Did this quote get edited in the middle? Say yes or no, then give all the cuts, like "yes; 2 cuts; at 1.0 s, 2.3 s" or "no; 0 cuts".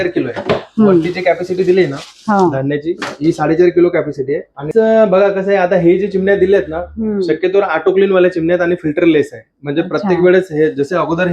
yes; 1 cut; at 4.7 s